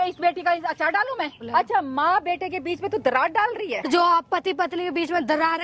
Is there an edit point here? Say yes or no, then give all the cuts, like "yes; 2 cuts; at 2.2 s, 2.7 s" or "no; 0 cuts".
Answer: yes; 2 cuts; at 1.4 s, 3.9 s